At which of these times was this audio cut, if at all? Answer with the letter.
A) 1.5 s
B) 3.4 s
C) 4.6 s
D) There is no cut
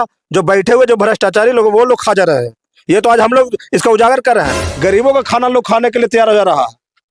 C